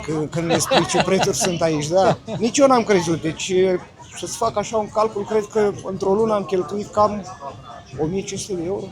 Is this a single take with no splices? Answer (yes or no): yes